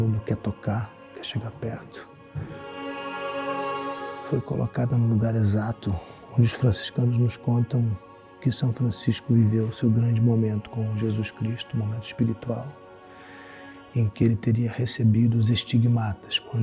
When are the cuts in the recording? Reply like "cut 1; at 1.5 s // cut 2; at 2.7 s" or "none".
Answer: cut 1; at 2.7 s // cut 2; at 4.2 s